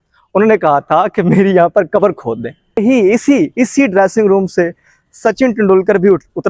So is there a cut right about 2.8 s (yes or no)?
yes